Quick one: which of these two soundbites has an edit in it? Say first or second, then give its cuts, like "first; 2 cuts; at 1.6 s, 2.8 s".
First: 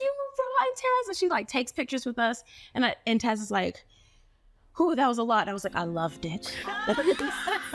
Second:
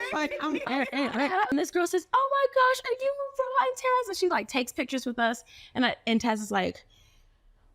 second; 1 cut; at 1.5 s